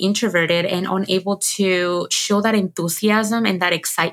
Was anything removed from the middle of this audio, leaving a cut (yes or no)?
no